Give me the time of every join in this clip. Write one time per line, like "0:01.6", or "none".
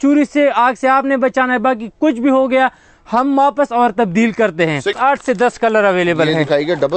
0:05.0

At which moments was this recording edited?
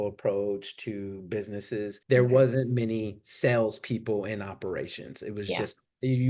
0:02.0

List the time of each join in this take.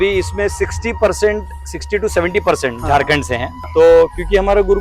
0:03.5

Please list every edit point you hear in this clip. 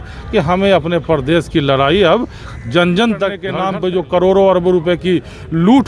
0:03.5

